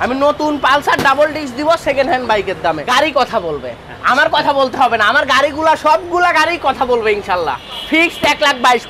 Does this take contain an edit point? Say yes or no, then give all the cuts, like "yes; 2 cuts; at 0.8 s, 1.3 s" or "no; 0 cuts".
yes; 2 cuts; at 2.8 s, 7.7 s